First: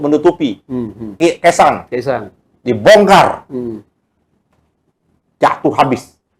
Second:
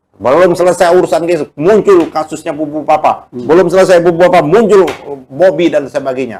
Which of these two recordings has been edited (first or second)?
first